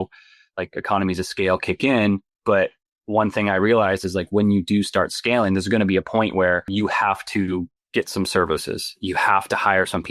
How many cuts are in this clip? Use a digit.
2